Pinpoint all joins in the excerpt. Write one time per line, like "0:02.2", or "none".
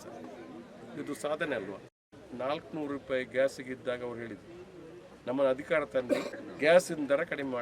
0:02.1
0:06.4